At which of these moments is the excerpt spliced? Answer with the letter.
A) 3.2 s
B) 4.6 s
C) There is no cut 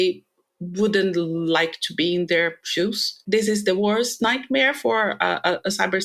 A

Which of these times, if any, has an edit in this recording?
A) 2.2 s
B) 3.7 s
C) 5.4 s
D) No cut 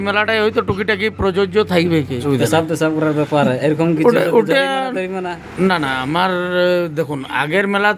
A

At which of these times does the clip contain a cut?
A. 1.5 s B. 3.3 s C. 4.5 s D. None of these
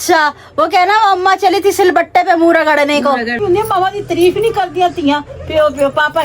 B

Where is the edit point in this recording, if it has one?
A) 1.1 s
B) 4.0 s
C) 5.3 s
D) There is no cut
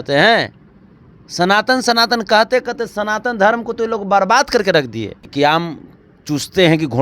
C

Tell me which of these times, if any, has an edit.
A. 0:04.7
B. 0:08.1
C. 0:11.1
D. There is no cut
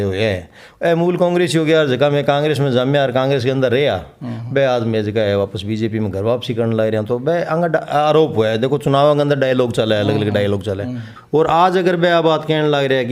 C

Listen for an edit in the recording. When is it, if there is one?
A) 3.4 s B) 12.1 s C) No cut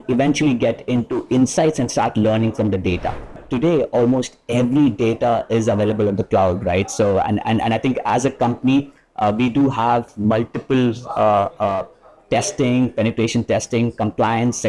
A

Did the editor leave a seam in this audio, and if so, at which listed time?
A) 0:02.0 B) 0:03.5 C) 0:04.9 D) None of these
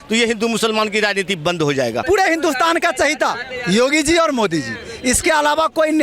A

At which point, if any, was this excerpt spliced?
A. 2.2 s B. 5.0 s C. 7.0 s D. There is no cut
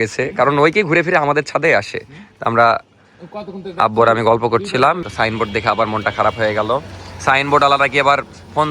B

